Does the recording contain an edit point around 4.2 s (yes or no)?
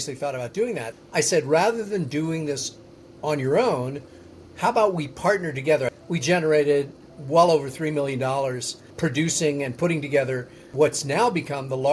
no